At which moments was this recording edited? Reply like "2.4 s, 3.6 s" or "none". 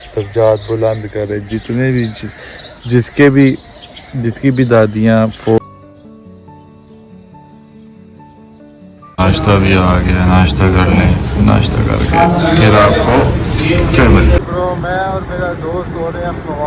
5.6 s, 9.2 s, 14.4 s

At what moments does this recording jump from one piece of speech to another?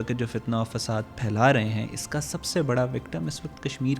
none

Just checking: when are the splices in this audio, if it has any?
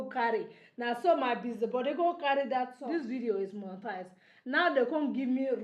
2.8 s

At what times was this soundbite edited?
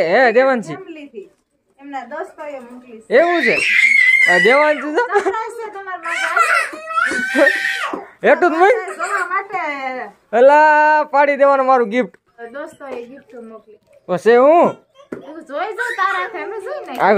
12.5 s

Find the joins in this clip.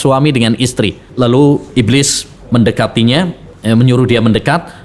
1.1 s, 1.7 s, 3.5 s

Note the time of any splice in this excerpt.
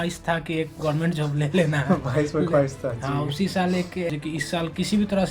4.1 s

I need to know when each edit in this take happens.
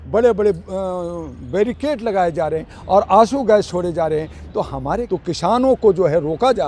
5.0 s

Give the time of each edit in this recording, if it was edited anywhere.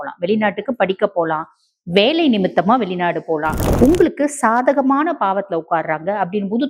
3.6 s

